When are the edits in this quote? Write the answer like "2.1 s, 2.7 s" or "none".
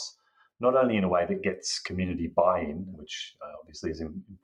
2.9 s